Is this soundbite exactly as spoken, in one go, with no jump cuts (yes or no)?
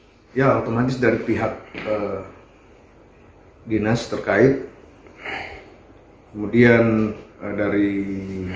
yes